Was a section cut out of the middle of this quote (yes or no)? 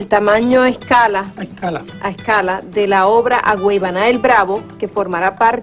yes